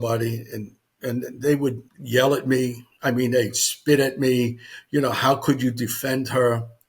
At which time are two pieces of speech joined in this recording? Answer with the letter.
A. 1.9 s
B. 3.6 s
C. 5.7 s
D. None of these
A